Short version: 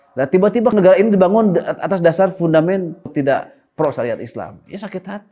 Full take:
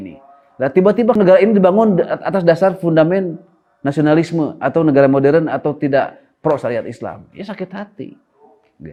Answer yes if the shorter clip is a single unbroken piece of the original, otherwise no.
no